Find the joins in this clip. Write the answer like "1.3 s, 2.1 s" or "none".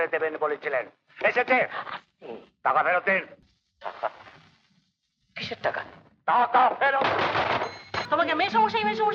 7.9 s